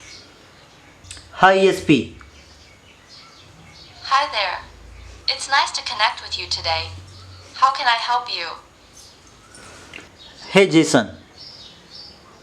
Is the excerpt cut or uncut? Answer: cut